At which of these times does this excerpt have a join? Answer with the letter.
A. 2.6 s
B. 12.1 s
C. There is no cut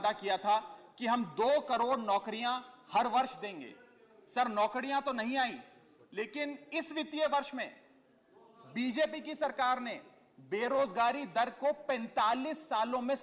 C